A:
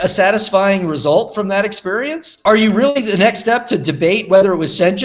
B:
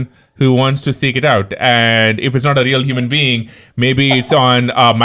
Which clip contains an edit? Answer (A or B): A